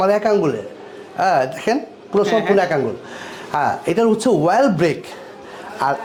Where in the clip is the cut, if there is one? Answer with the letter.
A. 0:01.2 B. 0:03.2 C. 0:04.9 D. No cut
D